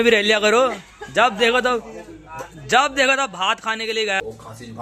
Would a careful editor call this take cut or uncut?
uncut